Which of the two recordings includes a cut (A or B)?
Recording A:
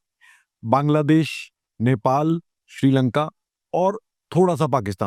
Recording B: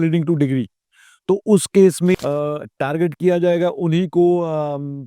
B